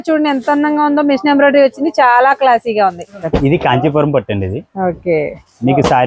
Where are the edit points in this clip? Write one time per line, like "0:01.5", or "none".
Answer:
0:03.1